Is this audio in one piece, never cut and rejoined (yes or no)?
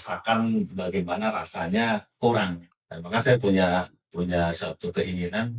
no